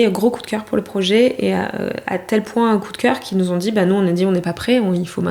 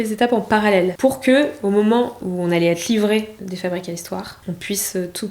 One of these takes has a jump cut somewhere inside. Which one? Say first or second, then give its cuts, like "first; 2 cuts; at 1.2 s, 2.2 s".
second; 4 cuts; at 0.9 s, 2.2 s, 3.4 s, 4.3 s